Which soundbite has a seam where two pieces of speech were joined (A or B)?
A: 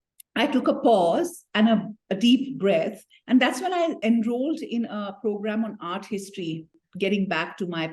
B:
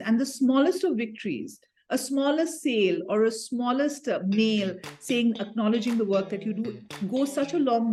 A